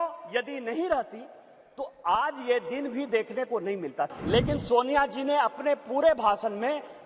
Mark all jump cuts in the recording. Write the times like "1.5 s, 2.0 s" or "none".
4.1 s